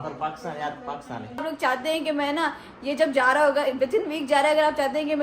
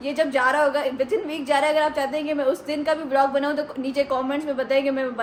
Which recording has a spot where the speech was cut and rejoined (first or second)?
first